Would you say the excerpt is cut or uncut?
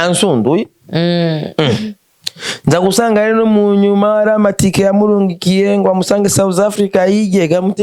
uncut